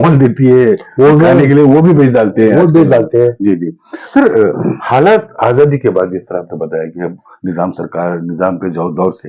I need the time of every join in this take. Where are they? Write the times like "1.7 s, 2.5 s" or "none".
none